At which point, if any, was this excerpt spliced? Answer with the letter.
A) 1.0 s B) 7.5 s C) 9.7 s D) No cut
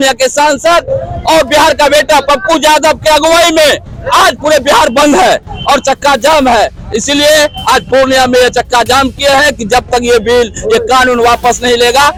D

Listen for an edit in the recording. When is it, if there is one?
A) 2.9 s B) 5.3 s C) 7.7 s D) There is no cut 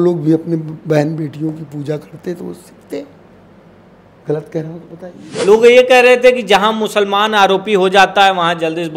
B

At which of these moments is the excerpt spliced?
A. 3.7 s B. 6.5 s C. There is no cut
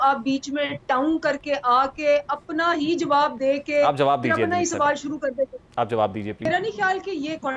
B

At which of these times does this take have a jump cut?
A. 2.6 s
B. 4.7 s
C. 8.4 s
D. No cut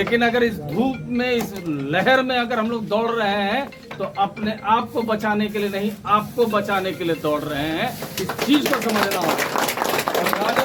D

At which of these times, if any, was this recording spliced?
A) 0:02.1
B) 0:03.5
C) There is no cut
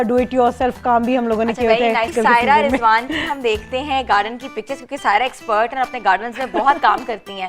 A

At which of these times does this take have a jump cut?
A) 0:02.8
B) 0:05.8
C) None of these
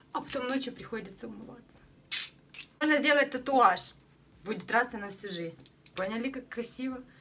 A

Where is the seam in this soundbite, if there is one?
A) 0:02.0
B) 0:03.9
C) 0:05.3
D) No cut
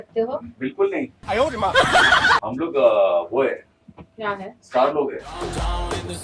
C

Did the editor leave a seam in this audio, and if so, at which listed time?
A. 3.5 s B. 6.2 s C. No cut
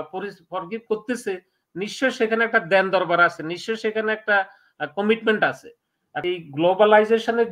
B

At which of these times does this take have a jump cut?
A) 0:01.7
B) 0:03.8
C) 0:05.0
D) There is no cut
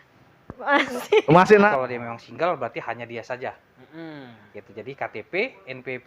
A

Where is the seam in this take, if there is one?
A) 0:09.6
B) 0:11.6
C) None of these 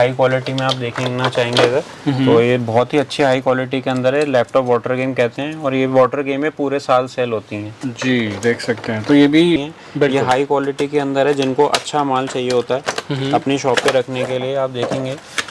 A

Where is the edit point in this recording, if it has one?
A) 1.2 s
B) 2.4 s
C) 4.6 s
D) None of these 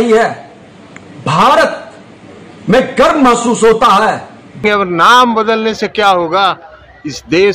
C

